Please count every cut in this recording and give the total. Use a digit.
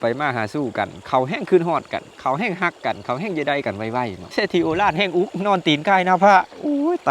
2